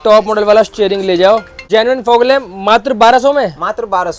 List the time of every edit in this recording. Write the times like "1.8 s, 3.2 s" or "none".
1.5 s